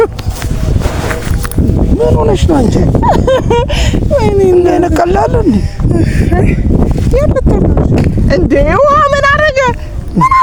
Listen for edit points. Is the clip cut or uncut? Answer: uncut